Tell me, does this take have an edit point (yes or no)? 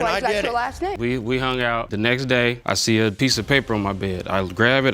yes